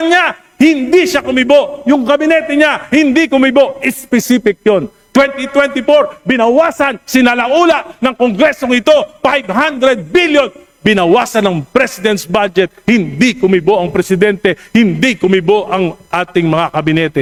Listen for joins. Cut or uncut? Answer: uncut